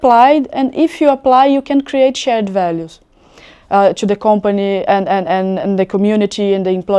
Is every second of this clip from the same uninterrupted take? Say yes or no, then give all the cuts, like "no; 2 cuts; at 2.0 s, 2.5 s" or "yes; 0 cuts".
yes; 0 cuts